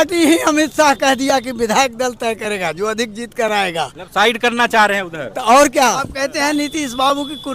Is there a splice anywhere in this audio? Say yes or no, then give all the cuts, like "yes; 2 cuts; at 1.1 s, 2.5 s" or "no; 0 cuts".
yes; 1 cut; at 6.1 s